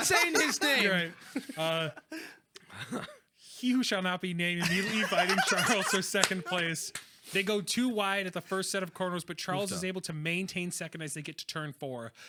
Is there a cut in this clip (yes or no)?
no